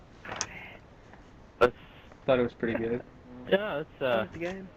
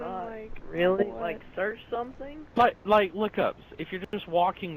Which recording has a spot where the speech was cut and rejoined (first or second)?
second